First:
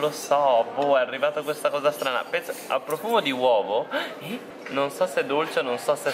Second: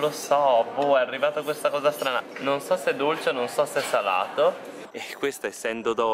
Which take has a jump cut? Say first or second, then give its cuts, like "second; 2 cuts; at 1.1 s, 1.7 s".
second; 2 cuts; at 2.3 s, 5.0 s